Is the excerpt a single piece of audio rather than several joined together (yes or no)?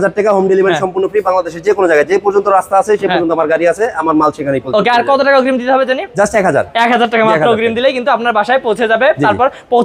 yes